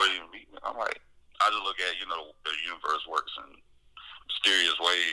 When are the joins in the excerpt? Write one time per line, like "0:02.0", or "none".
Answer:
0:01.2